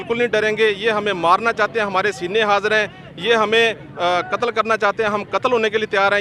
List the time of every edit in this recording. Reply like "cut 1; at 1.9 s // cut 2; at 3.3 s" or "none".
none